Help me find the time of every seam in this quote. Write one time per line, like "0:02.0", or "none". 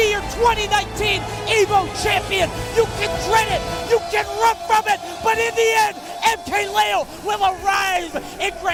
none